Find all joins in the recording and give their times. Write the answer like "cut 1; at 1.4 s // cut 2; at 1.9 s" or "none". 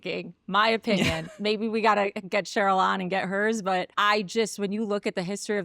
cut 1; at 3.9 s